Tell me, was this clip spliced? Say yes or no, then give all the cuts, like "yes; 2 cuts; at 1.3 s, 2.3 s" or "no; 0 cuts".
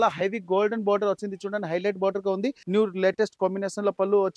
yes; 1 cut; at 2.6 s